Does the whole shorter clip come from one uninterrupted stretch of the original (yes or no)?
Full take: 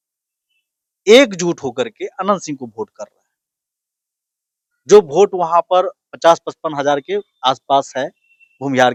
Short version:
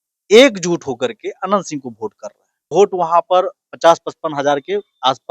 no